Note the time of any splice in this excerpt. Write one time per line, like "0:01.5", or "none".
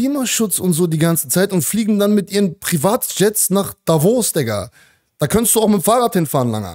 none